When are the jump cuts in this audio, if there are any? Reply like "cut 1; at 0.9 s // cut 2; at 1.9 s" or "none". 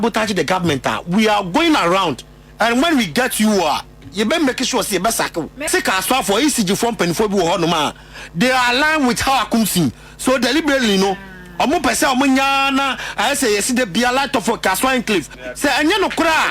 cut 1; at 5.7 s // cut 2; at 15.4 s